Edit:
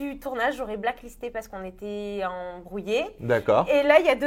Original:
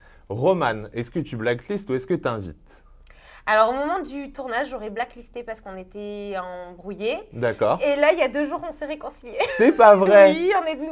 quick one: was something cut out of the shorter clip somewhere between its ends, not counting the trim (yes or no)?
no